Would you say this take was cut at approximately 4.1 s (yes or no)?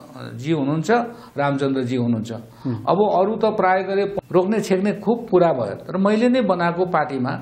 yes